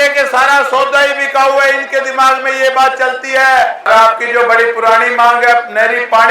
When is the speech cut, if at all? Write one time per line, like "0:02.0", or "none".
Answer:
0:03.9